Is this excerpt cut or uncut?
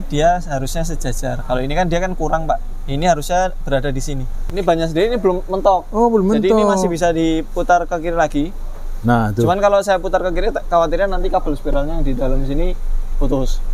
cut